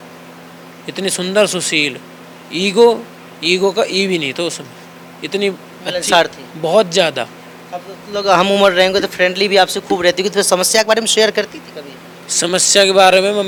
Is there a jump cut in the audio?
no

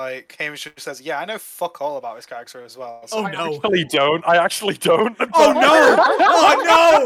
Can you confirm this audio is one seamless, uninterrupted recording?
yes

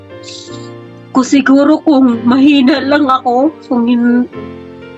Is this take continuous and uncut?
yes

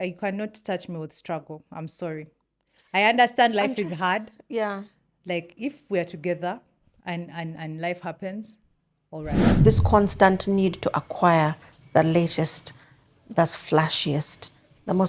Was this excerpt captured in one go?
no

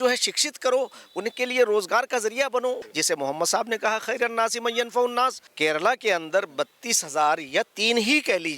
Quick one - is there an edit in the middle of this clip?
yes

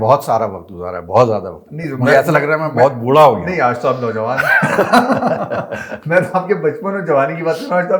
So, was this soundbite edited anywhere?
no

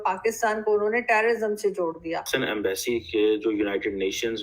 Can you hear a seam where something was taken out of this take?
yes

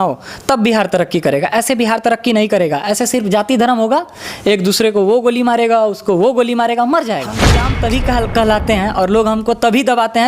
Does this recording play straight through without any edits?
no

